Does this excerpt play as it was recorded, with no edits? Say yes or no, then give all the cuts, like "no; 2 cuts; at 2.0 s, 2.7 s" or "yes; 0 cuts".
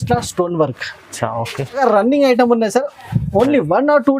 no; 1 cut; at 1.8 s